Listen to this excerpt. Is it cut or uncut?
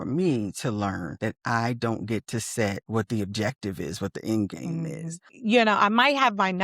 cut